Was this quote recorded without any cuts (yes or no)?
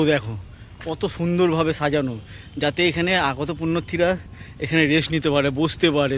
yes